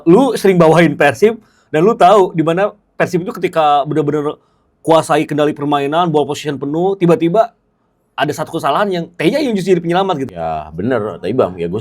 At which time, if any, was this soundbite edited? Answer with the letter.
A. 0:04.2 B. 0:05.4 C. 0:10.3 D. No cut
C